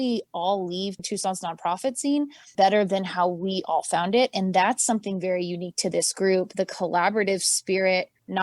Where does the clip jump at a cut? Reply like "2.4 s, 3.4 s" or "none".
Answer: none